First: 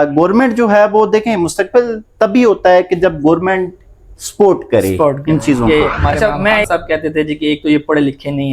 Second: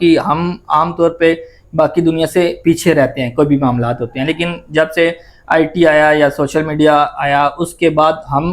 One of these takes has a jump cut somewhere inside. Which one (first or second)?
first